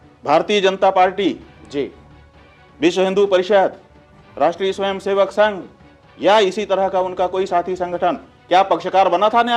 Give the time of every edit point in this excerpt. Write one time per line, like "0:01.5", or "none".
none